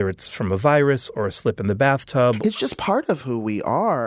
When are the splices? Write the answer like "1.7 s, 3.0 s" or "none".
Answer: 2.4 s